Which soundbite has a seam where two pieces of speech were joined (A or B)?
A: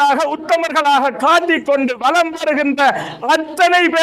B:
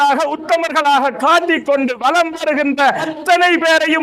B